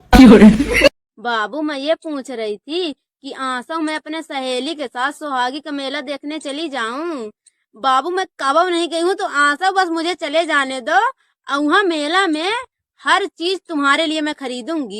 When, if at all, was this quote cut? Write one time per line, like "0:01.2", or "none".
0:00.9